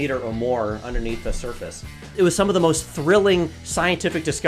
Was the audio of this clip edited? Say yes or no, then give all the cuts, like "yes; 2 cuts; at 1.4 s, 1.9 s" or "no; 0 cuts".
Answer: yes; 1 cut; at 2.1 s